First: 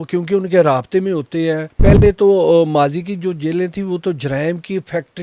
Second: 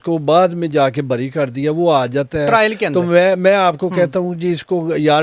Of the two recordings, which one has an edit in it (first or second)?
first